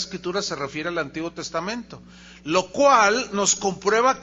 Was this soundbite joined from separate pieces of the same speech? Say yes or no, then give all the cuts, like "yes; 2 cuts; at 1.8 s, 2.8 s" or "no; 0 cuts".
no; 0 cuts